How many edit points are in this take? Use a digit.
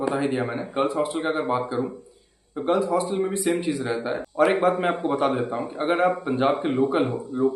1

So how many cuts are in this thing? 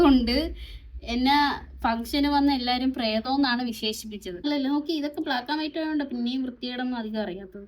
1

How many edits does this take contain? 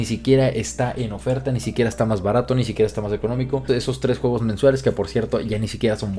1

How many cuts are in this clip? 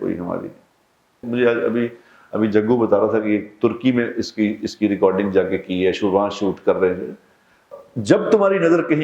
2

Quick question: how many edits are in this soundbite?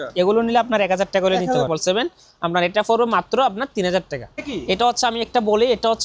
2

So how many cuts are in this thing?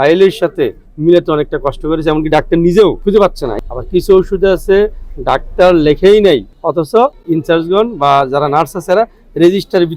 2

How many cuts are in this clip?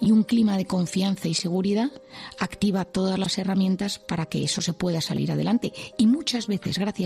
0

